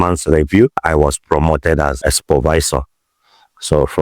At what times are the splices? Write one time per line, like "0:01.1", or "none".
0:00.8
0:02.0